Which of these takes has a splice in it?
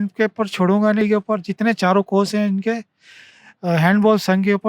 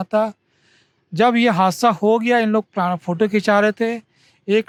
first; 1 cut; at 1.0 s

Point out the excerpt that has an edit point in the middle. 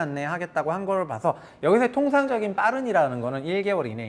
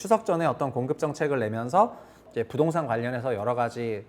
second; 1 cut; at 2.2 s

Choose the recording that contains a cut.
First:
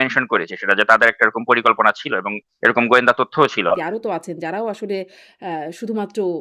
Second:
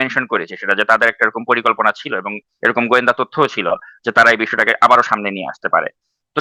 first; 1 cut; at 3.8 s

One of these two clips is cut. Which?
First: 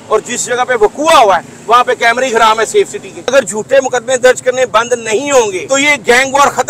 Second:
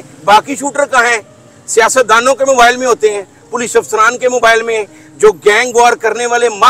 first; 2 cuts; at 3.3 s, 5.6 s

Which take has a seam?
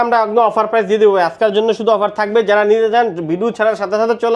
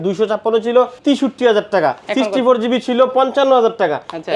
second; 2 cuts; at 0.9 s, 2.0 s

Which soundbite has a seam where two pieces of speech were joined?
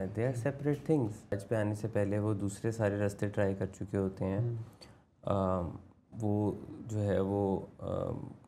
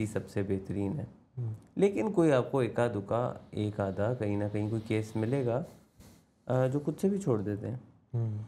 first; 1 cut; at 1.4 s

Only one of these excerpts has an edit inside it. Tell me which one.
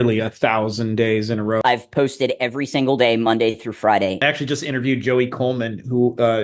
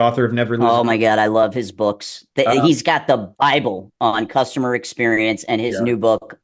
first; 2 cuts; at 1.6 s, 4.2 s

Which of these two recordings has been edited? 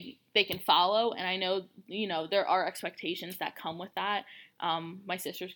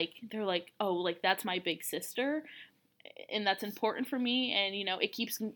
second; 1 cut; at 2.6 s

